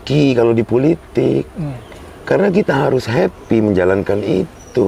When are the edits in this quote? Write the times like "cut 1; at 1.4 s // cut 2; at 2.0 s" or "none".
none